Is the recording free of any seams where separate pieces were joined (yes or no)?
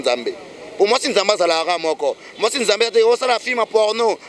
yes